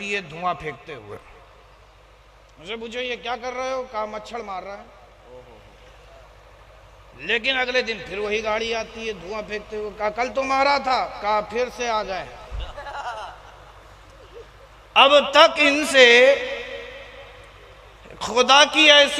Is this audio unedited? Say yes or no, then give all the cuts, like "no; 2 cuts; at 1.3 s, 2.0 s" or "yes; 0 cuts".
yes; 0 cuts